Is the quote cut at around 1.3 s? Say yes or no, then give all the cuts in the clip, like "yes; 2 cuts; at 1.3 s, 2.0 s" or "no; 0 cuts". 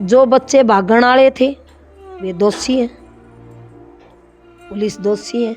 no; 2 cuts; at 3.1 s, 4.6 s